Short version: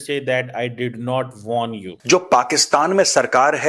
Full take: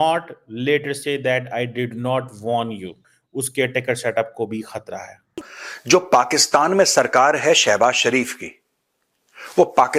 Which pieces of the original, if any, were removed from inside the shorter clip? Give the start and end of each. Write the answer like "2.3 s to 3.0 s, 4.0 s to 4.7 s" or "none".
2.9 s to 5.7 s